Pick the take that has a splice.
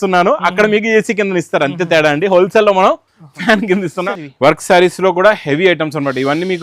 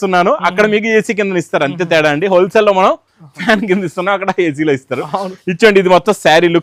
first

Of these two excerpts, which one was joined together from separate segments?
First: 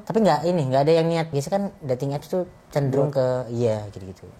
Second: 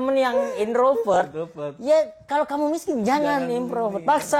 first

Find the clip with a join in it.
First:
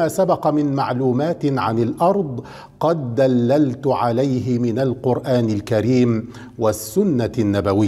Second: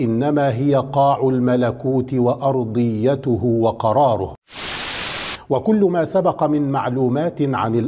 second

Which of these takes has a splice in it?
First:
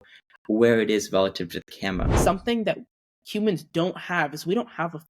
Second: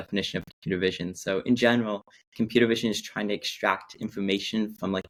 first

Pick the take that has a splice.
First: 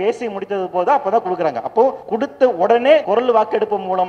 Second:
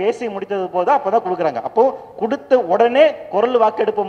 first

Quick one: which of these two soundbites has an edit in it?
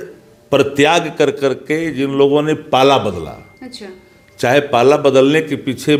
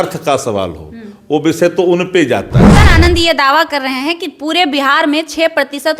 second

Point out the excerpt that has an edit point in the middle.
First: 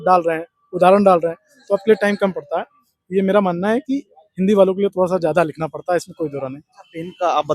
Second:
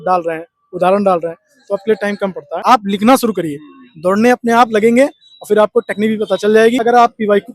second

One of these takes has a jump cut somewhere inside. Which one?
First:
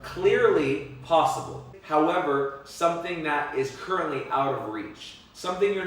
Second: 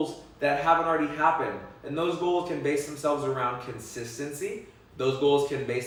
first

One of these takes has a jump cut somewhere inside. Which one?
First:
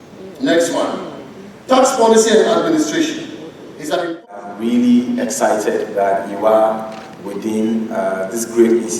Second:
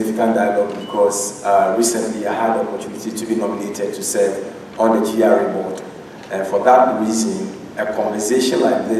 first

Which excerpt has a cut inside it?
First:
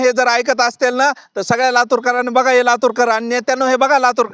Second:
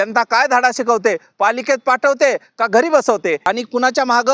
second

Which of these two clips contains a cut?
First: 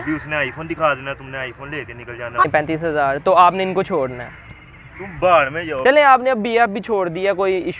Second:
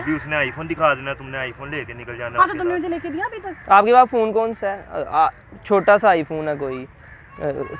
first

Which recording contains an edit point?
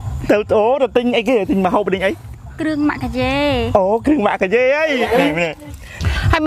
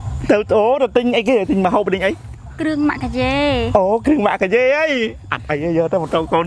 first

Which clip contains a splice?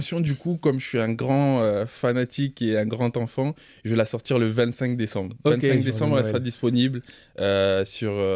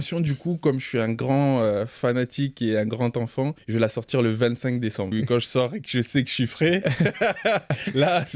second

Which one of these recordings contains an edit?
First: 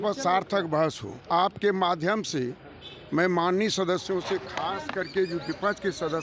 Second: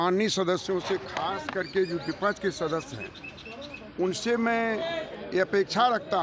first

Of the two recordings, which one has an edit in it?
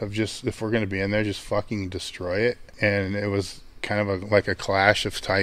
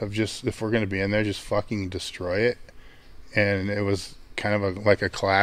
first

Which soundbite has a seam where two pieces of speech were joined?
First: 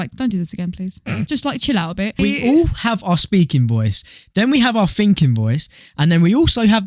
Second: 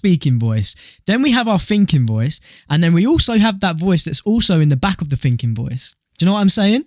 first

